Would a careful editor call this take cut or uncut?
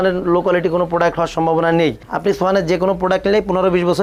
uncut